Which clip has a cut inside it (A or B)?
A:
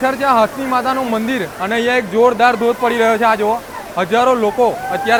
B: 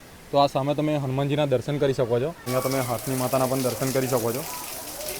B